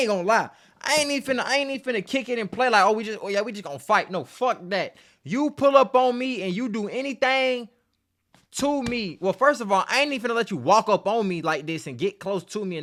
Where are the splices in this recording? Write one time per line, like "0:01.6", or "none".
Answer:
none